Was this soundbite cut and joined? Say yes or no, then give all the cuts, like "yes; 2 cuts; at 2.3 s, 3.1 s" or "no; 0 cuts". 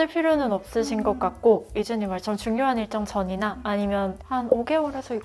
no; 0 cuts